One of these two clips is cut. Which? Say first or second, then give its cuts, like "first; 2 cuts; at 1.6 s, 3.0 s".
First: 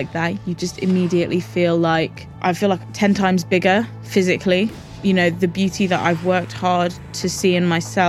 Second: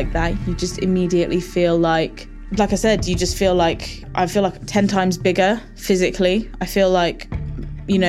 first; 2 cuts; at 2.2 s, 4.8 s